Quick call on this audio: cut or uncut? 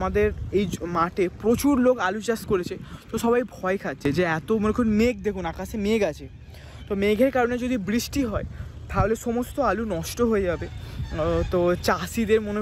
uncut